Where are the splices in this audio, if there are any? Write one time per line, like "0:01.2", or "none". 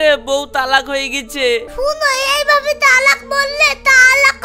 0:01.7